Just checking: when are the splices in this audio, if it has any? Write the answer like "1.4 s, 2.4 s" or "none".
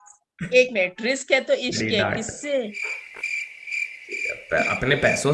none